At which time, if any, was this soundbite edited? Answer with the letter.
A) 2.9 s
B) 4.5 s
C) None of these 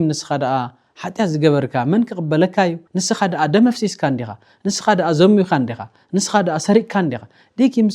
A